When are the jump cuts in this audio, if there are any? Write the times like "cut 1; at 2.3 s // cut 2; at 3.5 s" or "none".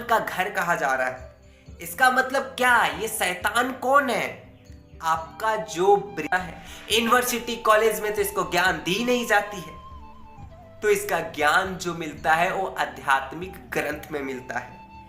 cut 1; at 6.3 s

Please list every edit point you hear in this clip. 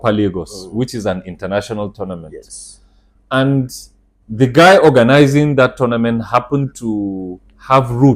none

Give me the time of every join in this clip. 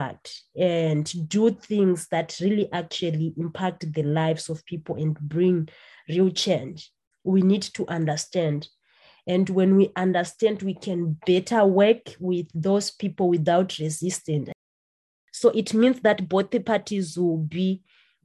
cut 1; at 14.7 s

